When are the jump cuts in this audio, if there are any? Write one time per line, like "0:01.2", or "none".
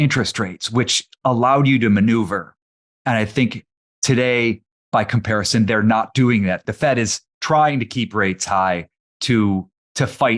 0:06.6
0:09.2